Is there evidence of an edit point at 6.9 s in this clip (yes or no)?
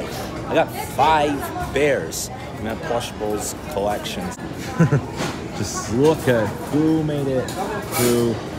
no